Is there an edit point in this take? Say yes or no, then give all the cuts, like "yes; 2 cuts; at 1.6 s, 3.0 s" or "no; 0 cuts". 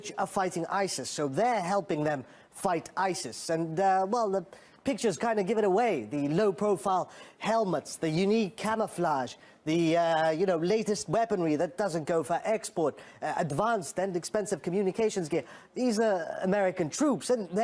yes; 1 cut; at 12.4 s